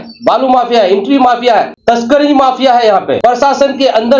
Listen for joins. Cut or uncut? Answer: cut